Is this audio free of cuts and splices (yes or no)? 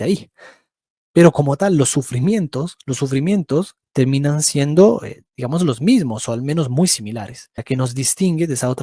no